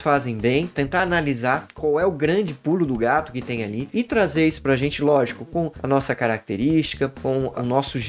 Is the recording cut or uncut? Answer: cut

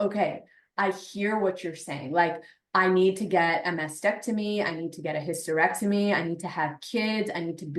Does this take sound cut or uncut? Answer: uncut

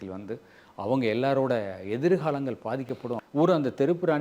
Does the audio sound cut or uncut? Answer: cut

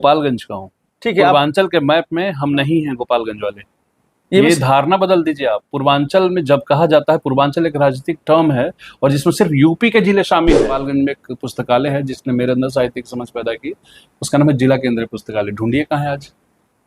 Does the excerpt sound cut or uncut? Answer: cut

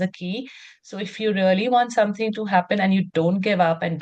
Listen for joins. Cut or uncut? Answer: uncut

